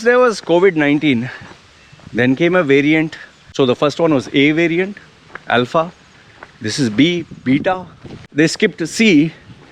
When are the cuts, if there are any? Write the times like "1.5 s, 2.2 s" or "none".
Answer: 3.5 s, 8.2 s